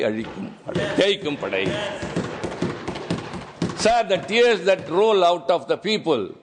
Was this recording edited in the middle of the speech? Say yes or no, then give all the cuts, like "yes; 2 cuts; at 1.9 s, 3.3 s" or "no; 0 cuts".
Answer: no; 0 cuts